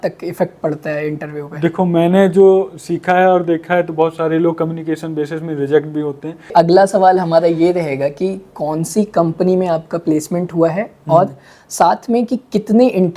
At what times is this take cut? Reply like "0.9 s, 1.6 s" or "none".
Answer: 6.3 s